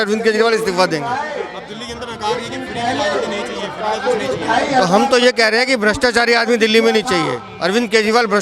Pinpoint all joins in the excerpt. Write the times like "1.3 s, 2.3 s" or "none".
none